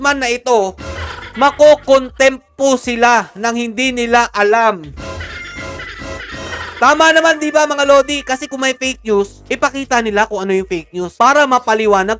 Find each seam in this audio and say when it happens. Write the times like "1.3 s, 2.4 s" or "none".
none